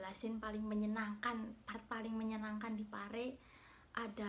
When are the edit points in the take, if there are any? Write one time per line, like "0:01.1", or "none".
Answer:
none